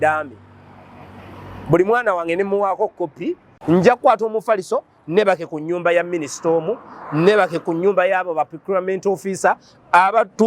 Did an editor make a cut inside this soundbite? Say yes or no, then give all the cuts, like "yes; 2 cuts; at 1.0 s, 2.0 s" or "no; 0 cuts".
yes; 1 cut; at 3.5 s